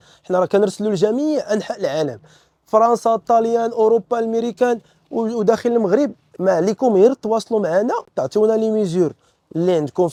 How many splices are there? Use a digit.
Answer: 0